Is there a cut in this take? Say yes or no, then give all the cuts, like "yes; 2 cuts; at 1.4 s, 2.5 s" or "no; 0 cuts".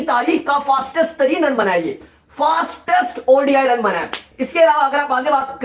no; 0 cuts